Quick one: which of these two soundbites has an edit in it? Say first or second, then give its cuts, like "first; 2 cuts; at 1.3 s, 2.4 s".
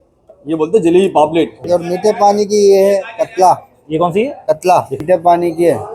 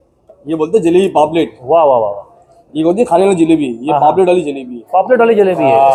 first; 2 cuts; at 1.6 s, 5.0 s